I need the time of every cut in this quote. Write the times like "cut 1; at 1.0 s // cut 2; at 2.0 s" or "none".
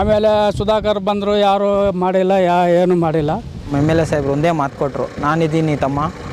cut 1; at 3.7 s